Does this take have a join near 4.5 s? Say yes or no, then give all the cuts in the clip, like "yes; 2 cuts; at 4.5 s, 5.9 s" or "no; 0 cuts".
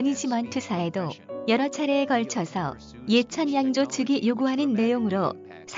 no; 1 cut; at 1.3 s